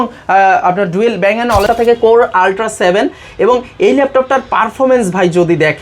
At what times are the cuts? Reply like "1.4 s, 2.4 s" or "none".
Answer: 1.7 s